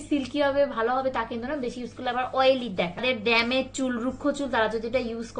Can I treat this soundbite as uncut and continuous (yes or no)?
no